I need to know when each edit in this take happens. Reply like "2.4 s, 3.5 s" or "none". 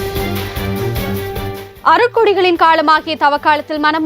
1.5 s